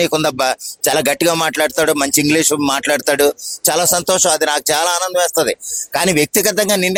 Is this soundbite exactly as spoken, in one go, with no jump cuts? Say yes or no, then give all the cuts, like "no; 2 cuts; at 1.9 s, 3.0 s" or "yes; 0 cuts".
yes; 0 cuts